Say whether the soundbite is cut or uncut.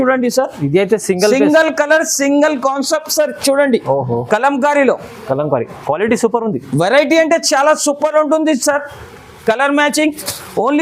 uncut